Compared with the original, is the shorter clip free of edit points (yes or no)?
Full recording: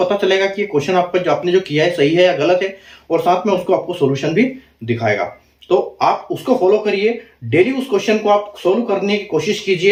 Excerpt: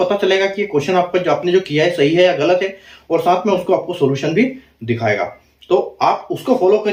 yes